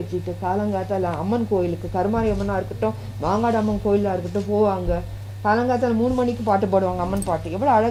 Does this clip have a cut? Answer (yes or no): no